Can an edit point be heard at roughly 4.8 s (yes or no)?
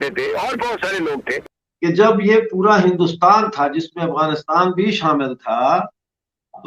no